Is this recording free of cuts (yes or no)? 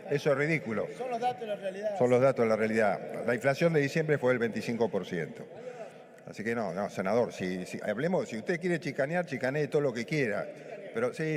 yes